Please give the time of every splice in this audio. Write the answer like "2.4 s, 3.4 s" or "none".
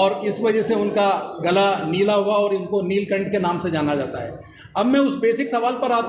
none